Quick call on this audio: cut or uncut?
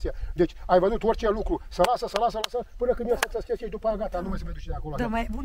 uncut